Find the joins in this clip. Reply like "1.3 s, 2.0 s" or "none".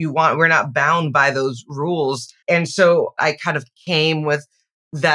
2.3 s, 3.2 s